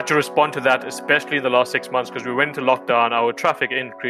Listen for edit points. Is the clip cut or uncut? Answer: uncut